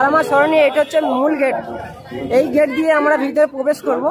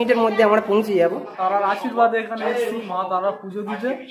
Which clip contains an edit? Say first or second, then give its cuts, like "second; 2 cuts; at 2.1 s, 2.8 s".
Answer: second; 1 cut; at 1.3 s